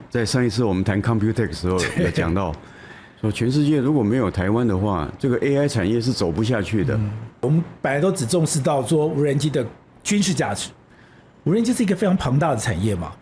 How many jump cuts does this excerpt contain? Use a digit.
1